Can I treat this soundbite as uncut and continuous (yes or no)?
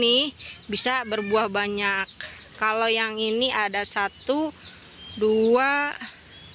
yes